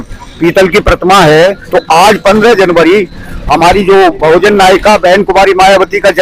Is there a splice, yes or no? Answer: yes